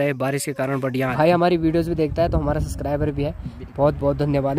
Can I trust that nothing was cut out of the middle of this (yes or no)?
no